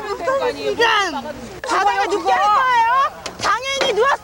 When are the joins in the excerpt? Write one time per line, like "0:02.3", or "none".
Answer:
0:01.5